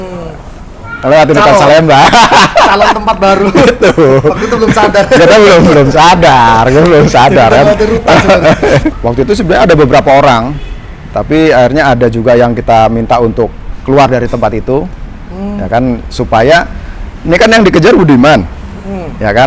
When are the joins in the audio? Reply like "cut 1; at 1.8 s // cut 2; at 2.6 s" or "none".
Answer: cut 1; at 8.9 s